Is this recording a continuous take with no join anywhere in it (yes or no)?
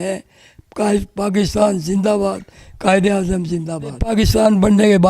no